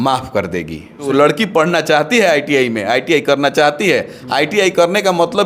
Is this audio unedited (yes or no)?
no